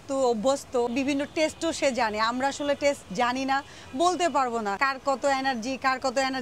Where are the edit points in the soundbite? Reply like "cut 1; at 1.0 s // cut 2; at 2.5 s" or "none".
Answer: cut 1; at 0.9 s // cut 2; at 4.8 s